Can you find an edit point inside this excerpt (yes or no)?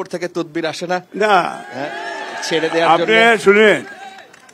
no